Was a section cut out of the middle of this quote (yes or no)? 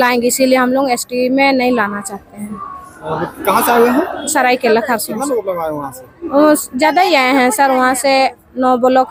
no